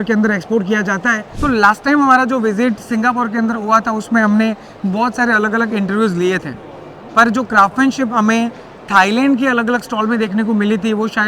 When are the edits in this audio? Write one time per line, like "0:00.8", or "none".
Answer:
0:01.3

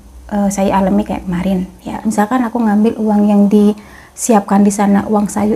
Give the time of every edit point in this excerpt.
0:02.0

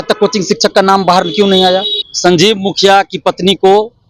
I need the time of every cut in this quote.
0:02.0

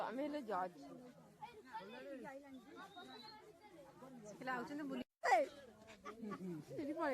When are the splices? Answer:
0:05.1

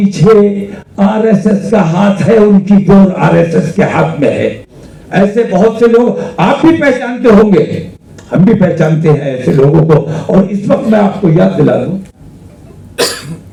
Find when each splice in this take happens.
none

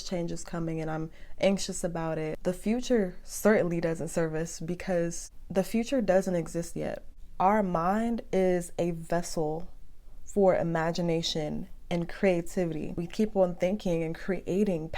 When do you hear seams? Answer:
0:02.4
0:13.0

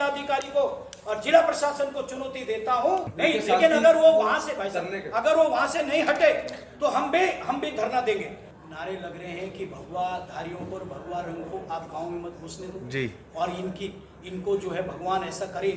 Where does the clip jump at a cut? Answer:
0:03.1
0:08.4

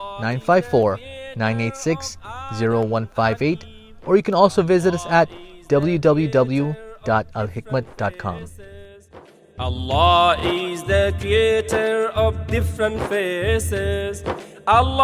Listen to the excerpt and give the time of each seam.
none

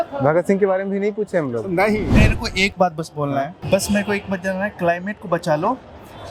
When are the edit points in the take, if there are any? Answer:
0:02.1
0:03.6

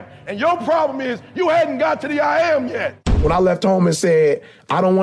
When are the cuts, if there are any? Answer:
0:03.2

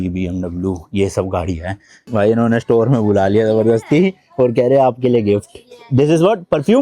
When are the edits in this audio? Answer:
0:01.9

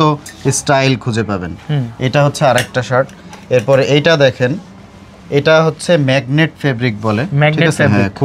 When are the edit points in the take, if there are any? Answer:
none

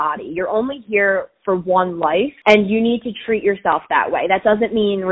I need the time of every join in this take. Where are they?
0:02.3

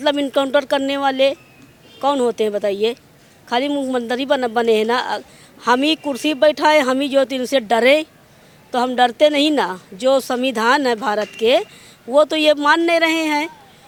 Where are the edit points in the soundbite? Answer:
none

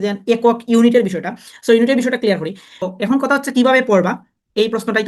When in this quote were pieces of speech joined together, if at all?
0:02.9

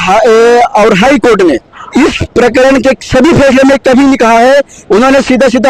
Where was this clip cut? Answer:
0:01.7
0:04.8

